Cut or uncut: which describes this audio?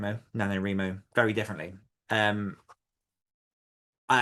cut